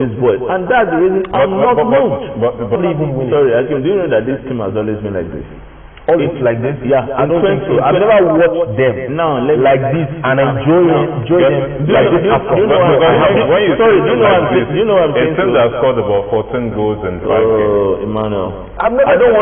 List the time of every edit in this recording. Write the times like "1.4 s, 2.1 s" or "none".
2.8 s